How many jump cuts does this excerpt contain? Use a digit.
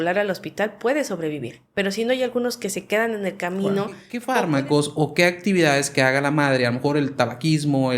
1